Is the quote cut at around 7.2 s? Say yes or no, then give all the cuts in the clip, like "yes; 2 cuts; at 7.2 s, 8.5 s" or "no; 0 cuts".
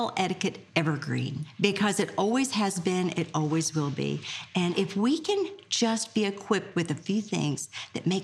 no; 2 cuts; at 1.4 s, 4.7 s